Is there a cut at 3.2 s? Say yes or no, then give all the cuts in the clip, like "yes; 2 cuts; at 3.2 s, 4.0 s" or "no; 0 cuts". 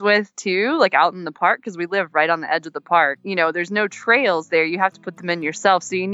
yes; 1 cut; at 3.2 s